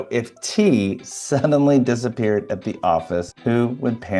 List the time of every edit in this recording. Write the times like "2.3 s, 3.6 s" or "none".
none